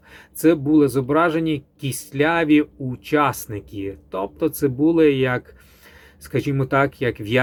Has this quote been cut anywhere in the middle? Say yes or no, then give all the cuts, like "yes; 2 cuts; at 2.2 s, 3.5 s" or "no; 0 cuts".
no; 0 cuts